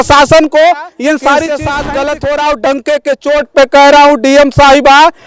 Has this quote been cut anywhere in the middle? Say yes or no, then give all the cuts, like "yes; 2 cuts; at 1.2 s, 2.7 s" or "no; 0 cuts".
yes; 1 cut; at 1.5 s